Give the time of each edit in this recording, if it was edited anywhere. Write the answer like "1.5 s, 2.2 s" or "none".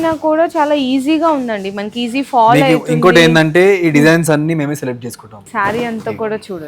5.4 s